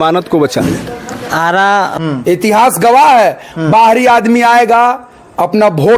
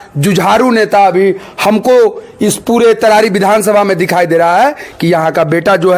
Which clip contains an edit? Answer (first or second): first